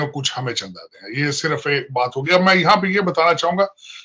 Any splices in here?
no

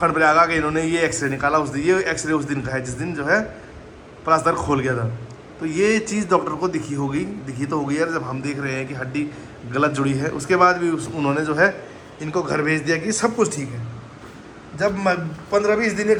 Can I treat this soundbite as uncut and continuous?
yes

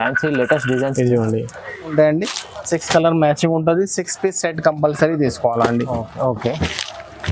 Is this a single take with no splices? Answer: no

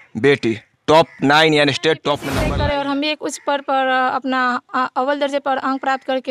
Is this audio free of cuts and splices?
no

